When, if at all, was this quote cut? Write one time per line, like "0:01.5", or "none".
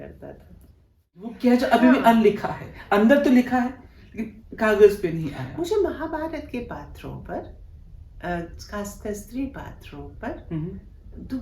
0:01.3